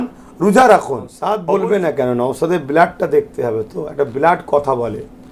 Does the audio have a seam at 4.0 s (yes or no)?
no